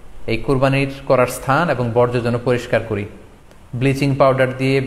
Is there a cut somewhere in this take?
no; 0 cuts

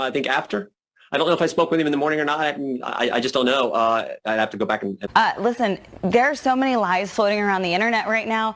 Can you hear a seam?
yes; 1 cut; at 5.0 s

